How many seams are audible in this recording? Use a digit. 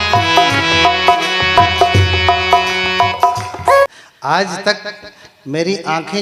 1